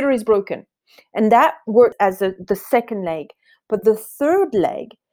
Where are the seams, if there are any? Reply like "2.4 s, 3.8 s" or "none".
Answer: 1.9 s